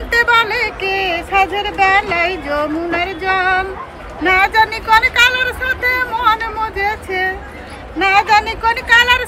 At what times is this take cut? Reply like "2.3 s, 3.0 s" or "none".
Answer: none